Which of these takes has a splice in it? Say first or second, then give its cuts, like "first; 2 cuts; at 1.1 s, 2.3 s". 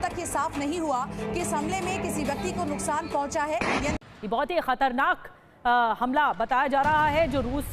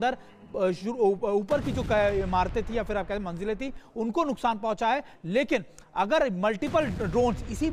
first; 1 cut; at 4.0 s